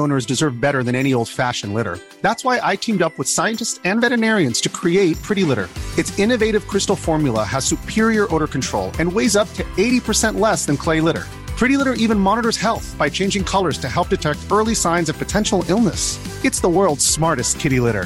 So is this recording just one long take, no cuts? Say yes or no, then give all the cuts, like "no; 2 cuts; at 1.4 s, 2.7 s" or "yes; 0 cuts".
yes; 0 cuts